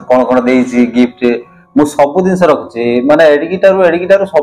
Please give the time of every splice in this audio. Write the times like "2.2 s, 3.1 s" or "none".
none